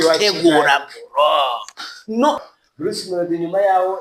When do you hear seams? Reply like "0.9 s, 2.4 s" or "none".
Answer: 2.4 s